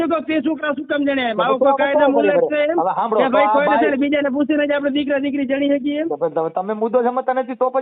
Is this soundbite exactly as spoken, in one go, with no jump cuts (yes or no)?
yes